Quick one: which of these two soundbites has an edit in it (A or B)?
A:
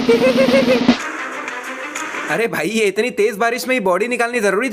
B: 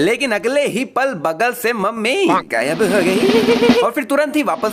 A